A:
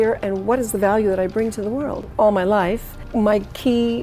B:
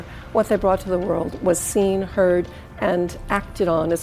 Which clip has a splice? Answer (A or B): A